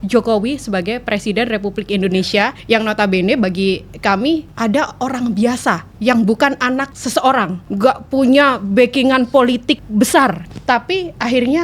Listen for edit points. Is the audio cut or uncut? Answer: cut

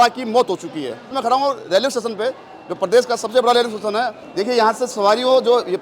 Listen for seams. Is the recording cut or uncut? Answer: cut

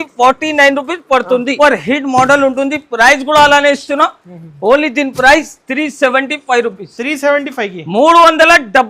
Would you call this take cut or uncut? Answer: cut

